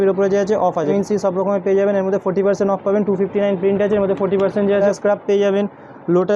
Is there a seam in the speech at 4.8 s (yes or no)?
yes